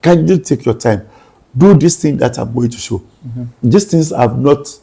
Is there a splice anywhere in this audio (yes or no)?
no